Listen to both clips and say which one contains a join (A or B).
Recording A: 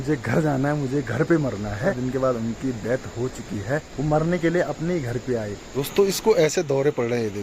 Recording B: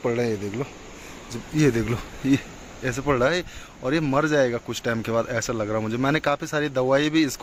A